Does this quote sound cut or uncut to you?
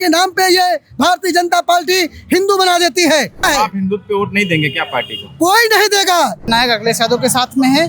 cut